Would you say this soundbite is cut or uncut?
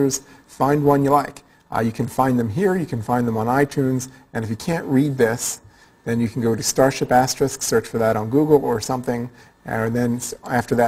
uncut